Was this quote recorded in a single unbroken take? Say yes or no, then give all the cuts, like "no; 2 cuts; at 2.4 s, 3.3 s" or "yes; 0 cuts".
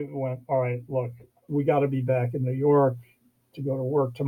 no; 1 cut; at 1.4 s